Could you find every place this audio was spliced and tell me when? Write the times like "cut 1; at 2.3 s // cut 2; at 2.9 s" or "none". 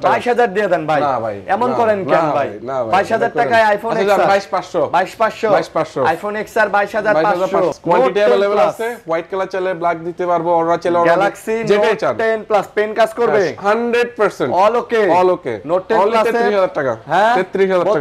cut 1; at 7.7 s